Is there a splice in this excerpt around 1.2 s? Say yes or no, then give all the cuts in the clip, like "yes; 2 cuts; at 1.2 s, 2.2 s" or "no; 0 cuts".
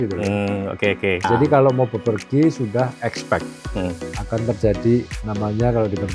yes; 1 cut; at 1.2 s